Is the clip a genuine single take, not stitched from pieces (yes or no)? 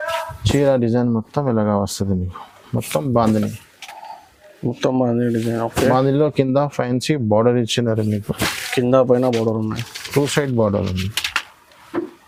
yes